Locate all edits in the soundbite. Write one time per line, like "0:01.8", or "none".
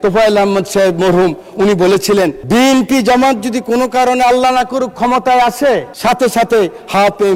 0:02.4
0:05.9